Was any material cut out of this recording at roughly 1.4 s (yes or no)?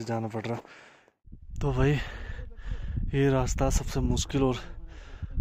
yes